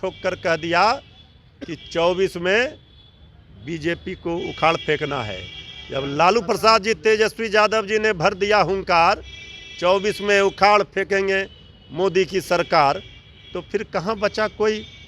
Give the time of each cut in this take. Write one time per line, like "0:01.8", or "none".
none

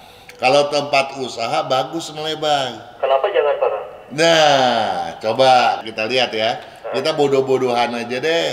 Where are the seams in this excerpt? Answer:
none

